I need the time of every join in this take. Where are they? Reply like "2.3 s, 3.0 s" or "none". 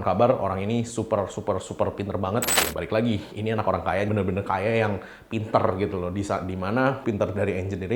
2.6 s, 7.0 s